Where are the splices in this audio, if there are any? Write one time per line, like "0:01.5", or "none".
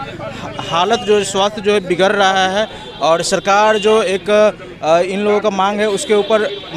none